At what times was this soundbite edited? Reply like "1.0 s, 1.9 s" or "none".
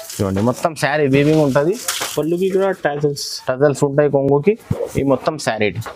none